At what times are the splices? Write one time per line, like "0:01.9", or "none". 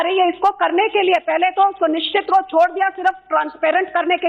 0:01.2